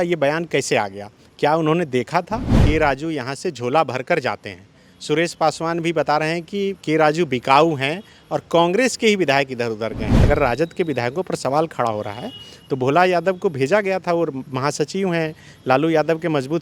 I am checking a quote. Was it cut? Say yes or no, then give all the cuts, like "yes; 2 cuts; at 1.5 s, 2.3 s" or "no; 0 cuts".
yes; 2 cuts; at 2.6 s, 10.1 s